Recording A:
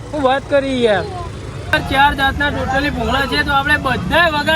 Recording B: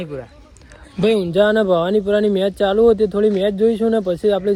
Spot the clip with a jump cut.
A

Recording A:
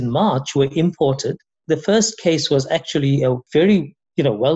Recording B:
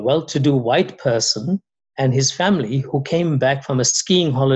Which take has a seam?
A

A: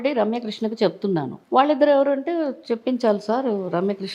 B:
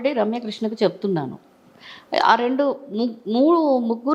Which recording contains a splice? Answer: A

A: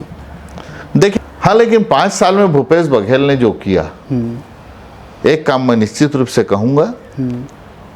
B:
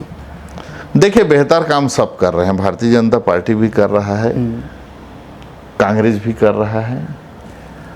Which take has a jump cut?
A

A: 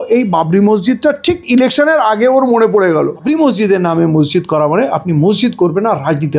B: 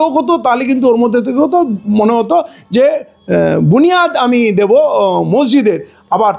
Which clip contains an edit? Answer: A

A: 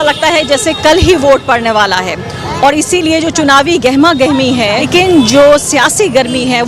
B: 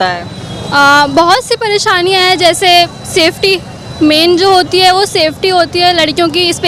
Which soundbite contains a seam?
A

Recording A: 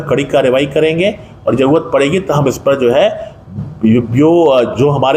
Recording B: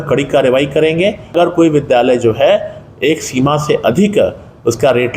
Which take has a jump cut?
B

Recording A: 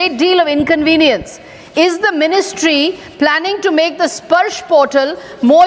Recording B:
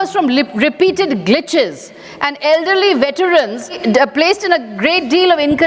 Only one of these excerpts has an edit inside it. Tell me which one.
B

